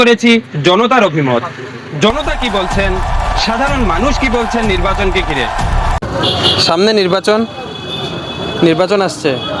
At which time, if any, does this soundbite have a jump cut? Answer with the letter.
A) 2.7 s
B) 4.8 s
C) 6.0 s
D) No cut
C